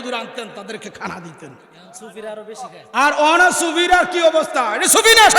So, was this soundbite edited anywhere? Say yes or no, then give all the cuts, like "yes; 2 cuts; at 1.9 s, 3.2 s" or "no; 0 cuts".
no; 0 cuts